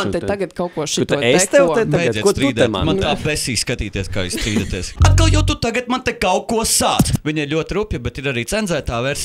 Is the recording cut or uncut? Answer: cut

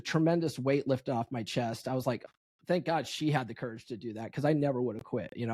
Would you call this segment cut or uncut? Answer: cut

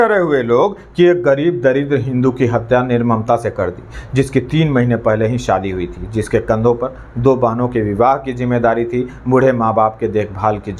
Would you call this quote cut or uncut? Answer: uncut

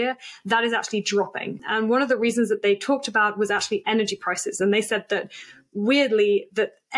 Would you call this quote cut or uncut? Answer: cut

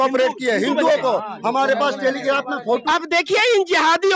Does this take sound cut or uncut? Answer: cut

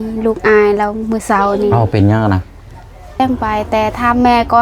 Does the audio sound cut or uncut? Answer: cut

